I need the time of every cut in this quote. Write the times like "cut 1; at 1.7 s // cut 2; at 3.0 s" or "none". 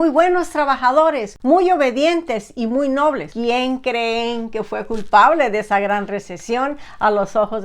cut 1; at 1.3 s // cut 2; at 3.3 s